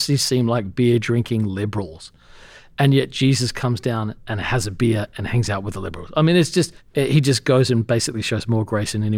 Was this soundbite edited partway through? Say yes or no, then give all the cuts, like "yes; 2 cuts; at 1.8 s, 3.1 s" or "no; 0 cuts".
yes; 1 cut; at 6.8 s